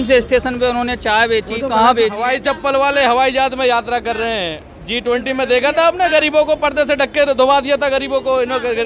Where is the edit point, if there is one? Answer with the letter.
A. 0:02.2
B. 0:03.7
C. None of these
A